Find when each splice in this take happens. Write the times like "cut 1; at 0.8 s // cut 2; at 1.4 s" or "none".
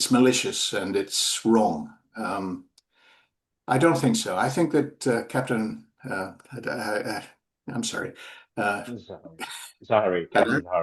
none